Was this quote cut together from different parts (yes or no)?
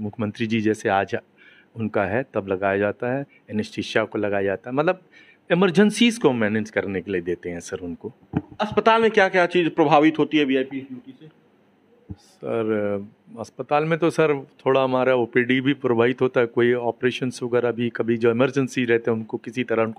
no